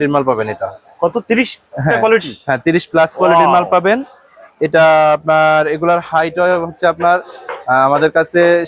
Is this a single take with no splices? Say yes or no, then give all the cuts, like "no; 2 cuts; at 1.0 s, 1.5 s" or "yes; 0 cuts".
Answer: yes; 0 cuts